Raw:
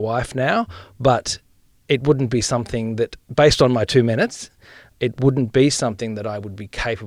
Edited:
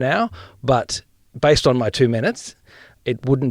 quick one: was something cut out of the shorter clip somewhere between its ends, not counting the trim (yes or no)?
yes